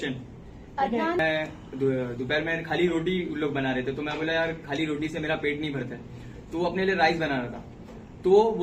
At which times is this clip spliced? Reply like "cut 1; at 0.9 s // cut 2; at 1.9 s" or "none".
cut 1; at 1.2 s